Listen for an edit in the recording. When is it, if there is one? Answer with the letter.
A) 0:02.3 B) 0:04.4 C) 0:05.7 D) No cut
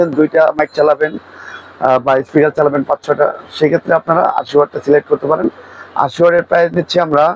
D